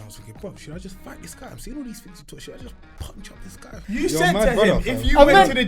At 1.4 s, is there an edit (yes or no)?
no